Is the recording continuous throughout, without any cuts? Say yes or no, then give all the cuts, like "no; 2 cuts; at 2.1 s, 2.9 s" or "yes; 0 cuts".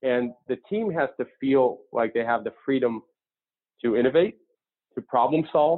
yes; 0 cuts